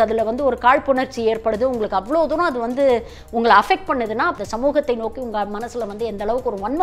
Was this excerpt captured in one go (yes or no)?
no